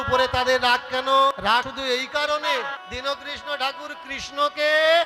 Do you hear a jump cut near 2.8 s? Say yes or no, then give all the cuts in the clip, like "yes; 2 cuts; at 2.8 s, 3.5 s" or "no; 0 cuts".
yes; 2 cuts; at 1.6 s, 2.8 s